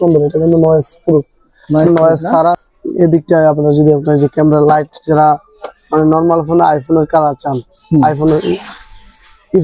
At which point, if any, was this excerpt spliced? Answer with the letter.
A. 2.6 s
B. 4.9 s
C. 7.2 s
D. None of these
A